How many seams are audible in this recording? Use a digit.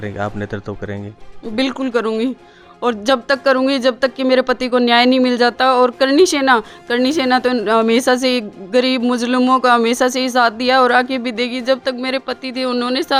0